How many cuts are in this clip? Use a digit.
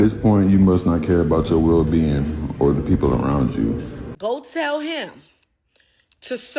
1